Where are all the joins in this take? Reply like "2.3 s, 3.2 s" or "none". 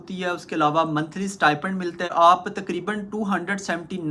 2.1 s